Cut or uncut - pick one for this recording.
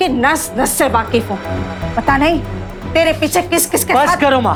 uncut